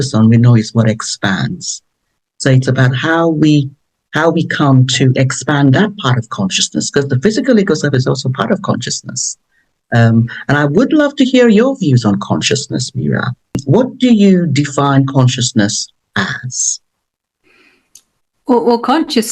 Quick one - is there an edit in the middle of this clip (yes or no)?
no